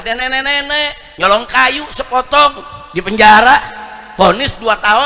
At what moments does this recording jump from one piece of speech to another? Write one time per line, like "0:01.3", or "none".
0:01.0